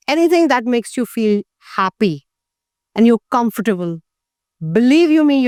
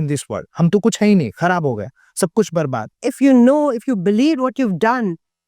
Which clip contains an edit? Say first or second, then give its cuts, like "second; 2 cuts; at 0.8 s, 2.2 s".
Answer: second; 1 cut; at 3.0 s